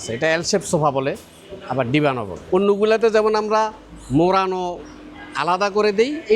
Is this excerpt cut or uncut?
cut